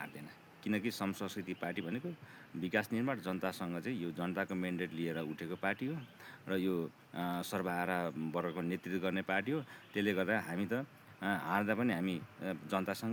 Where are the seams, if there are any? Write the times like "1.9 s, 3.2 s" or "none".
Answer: none